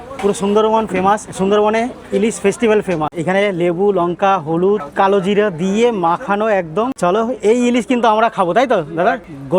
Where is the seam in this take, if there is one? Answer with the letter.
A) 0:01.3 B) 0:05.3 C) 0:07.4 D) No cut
D